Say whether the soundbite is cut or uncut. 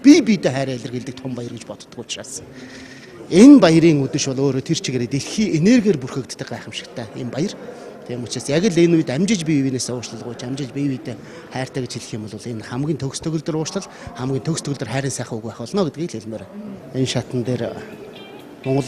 uncut